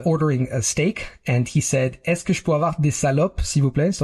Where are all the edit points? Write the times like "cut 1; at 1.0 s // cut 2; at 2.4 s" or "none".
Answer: none